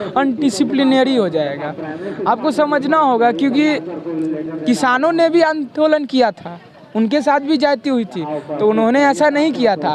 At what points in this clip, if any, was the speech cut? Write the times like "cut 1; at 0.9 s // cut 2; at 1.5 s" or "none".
none